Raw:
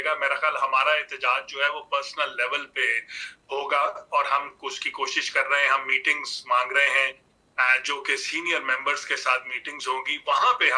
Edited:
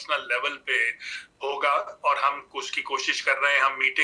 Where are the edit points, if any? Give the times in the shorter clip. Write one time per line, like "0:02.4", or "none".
none